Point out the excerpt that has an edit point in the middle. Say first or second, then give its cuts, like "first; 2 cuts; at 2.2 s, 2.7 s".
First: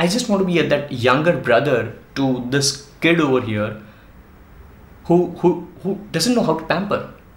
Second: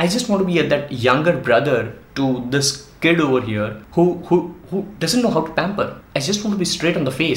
second; 2 cuts; at 3.8 s, 6.0 s